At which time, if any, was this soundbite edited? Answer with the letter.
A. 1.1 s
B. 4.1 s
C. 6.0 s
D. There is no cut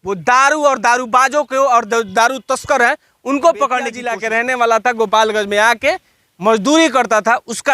B